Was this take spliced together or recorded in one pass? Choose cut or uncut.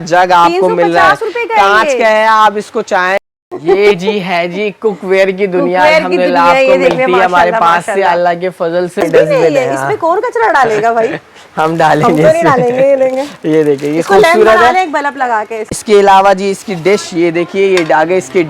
cut